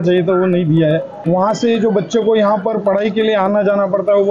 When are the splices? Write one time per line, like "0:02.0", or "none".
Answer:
0:01.1